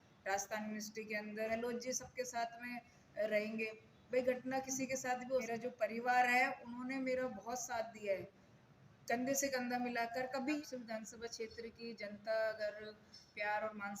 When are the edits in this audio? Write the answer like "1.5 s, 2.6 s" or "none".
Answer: 1.5 s, 5.4 s, 10.6 s